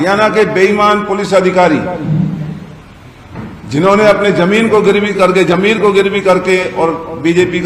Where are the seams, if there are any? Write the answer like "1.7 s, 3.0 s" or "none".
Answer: none